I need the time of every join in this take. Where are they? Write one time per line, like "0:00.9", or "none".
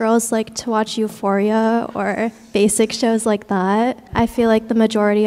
0:04.1

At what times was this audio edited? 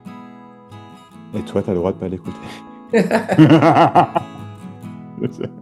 0:01.3

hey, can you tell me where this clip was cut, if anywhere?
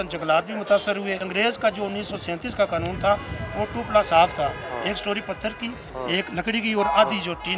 0:01.2

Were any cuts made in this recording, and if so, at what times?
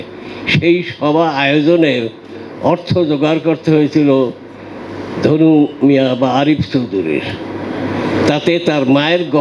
none

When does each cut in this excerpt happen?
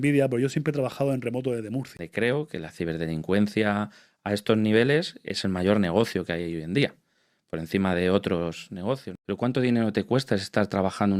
0:02.0
0:09.1

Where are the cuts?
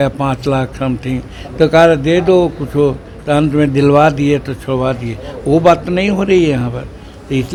none

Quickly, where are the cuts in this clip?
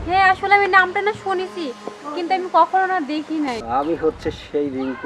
0:03.6

